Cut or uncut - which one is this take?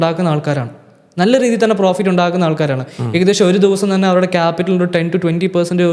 uncut